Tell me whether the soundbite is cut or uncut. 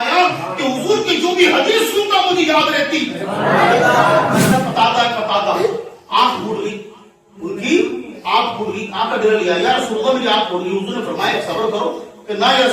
cut